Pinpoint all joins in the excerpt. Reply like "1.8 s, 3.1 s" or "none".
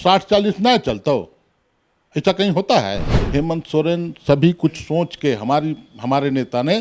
3.1 s